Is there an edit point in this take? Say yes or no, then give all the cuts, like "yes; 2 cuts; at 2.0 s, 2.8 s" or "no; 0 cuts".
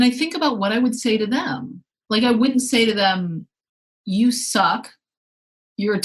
no; 0 cuts